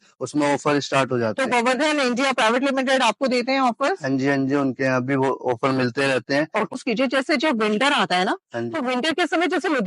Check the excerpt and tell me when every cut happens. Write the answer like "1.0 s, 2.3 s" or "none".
6.8 s